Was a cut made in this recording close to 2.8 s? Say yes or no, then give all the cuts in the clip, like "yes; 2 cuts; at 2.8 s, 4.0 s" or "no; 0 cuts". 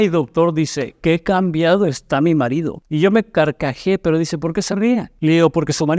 yes; 2 cuts; at 2.8 s, 5.1 s